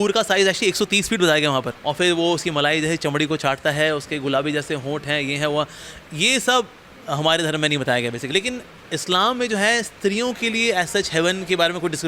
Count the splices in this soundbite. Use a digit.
2